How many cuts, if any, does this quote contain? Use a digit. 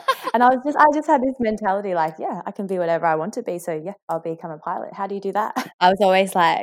2